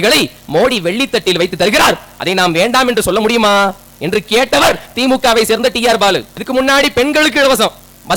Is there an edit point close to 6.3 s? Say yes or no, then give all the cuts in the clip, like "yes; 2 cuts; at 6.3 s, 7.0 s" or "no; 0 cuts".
yes; 1 cut; at 6.3 s